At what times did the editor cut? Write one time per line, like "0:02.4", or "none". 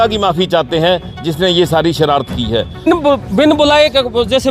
0:02.9